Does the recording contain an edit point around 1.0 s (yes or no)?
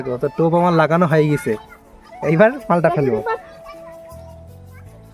no